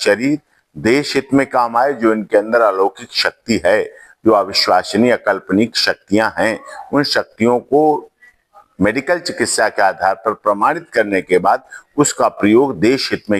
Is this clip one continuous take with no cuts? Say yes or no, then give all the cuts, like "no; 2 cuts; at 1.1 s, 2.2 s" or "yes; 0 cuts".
yes; 0 cuts